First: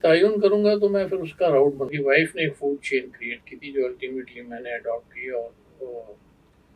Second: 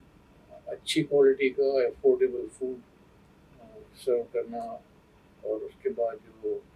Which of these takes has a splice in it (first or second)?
first